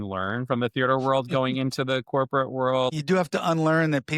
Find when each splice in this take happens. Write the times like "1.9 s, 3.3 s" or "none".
2.9 s